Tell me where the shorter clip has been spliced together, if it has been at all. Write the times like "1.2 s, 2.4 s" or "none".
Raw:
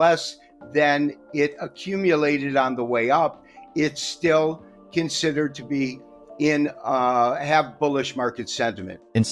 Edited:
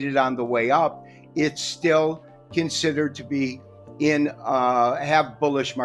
none